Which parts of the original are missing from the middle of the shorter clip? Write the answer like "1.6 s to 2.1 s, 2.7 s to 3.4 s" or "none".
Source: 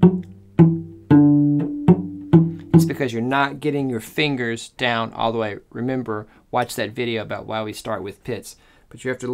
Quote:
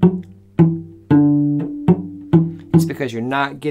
none

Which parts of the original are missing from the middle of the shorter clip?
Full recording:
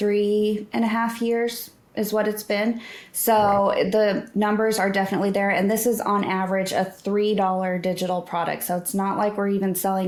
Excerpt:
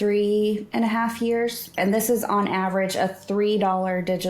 1.8 s to 5.5 s

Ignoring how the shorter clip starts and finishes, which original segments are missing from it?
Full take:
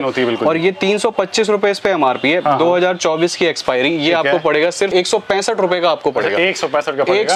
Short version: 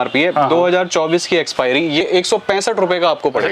4.2 s to 4.9 s

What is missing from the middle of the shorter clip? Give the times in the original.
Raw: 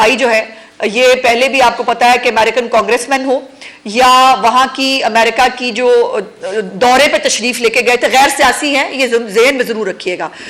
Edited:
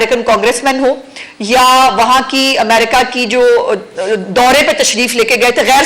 none

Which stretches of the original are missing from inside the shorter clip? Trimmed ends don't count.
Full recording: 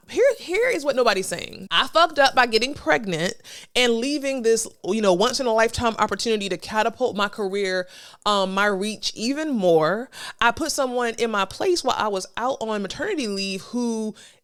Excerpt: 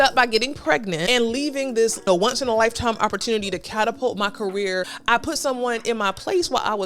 3.2 s to 3.7 s, 4.7 s to 5.0 s, 7.9 s to 10.3 s

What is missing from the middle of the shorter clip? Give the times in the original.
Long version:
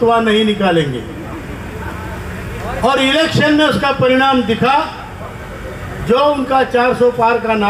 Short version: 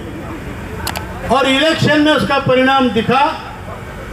2.1 s to 2.6 s

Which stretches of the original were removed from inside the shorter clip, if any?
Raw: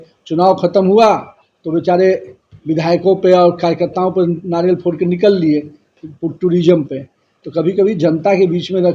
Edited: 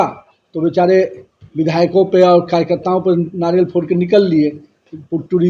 none

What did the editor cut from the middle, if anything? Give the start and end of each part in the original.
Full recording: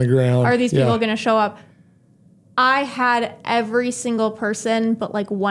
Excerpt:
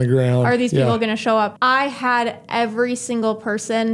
1.5 s to 2.5 s

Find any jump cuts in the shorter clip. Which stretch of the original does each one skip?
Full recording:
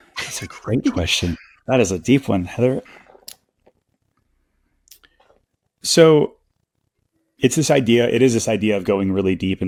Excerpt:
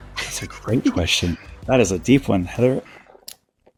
none

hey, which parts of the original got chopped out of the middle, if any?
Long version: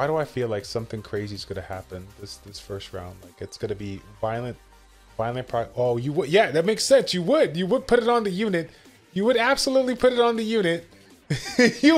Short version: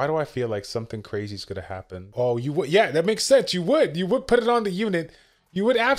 2.1 s to 5.7 s

